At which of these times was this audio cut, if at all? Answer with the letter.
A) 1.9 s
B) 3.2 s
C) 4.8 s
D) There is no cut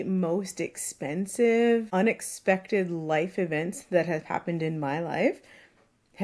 A